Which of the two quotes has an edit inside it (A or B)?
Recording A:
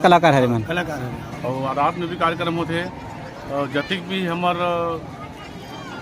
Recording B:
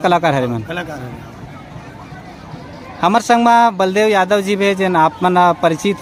A